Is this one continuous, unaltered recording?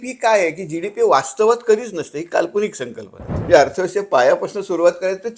no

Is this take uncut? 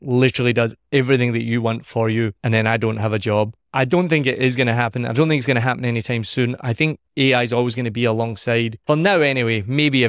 no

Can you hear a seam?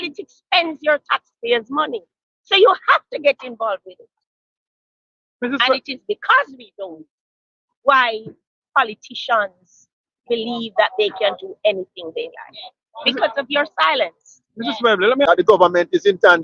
yes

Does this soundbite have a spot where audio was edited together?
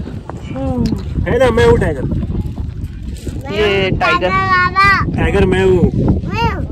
no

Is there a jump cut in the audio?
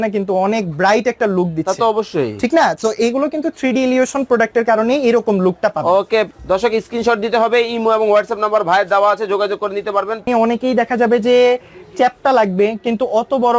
yes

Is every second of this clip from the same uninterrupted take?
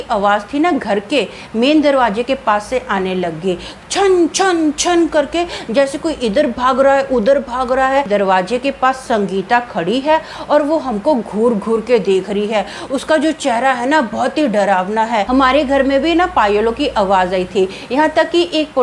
no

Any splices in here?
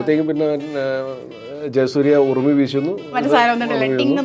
no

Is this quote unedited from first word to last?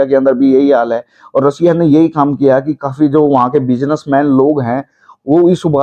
yes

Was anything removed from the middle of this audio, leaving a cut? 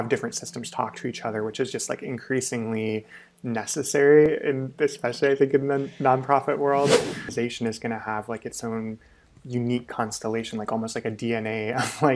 yes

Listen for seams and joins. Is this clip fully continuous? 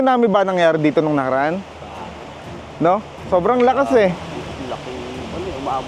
yes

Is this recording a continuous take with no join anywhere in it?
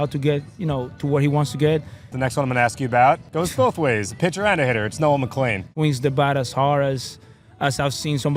no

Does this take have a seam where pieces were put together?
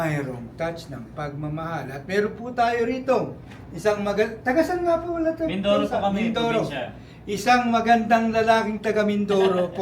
no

